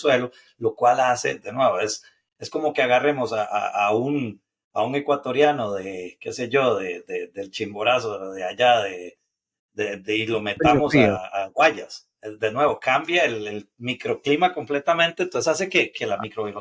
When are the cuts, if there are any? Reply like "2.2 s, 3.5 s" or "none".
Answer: none